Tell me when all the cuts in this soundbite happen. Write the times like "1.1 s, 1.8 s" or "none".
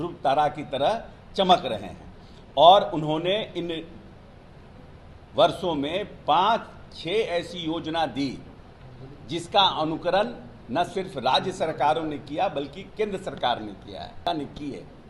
14.2 s